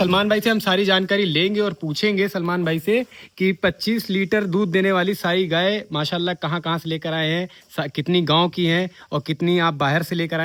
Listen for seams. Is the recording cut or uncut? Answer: uncut